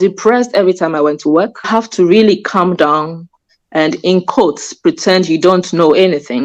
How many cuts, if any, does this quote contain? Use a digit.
1